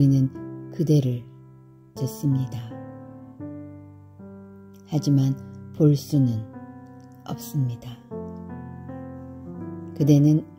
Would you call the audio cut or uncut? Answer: cut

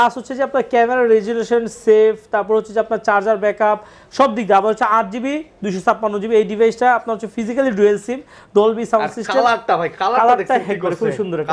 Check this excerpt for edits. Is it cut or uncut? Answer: uncut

